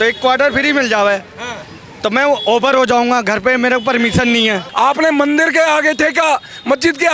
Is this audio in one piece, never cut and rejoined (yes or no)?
no